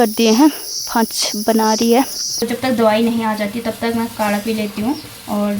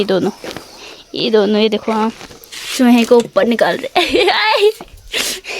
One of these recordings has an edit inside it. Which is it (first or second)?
first